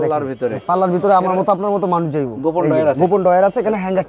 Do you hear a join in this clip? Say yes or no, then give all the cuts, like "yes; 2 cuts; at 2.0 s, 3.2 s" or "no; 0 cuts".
no; 0 cuts